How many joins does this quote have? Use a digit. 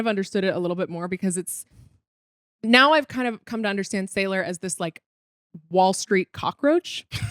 0